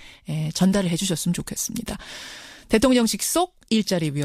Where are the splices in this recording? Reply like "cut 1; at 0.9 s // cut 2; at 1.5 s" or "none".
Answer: cut 1; at 1.5 s